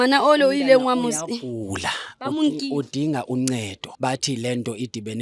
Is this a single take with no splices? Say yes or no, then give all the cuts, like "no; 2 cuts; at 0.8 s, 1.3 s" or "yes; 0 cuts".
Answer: no; 1 cut; at 3.8 s